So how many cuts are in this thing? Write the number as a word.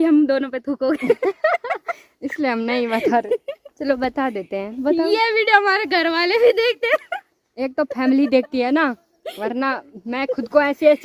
zero